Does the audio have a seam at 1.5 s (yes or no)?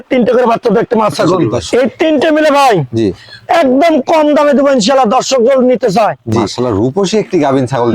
yes